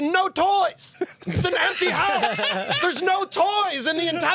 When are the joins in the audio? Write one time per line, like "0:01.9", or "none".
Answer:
none